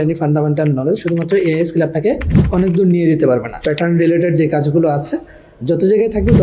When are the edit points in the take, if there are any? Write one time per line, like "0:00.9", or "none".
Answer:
0:03.6